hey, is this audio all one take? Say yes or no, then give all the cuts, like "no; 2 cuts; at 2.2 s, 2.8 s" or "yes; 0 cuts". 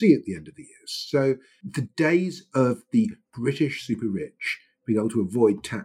yes; 0 cuts